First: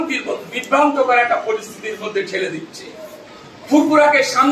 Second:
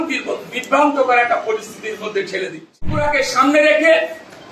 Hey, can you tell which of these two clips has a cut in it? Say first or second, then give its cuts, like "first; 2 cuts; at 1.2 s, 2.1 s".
second; 1 cut; at 3.0 s